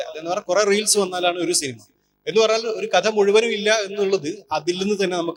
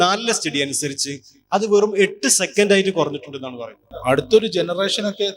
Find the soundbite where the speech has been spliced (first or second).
second